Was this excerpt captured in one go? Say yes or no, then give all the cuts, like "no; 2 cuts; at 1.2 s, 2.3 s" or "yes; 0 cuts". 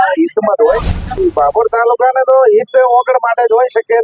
no; 1 cut; at 1.2 s